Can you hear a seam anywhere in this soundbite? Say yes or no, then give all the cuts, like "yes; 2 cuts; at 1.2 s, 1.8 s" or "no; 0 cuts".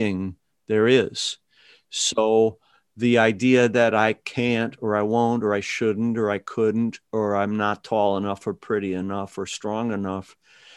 no; 0 cuts